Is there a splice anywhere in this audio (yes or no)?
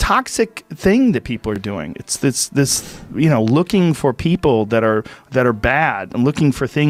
no